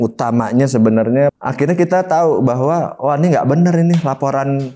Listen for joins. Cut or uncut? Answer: cut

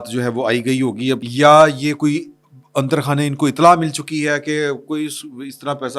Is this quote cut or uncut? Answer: cut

